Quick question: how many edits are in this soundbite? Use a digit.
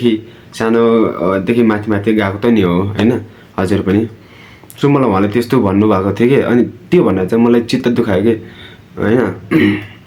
0